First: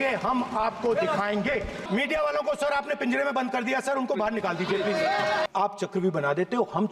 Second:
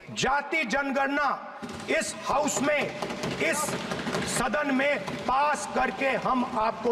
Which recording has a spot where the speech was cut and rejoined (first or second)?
first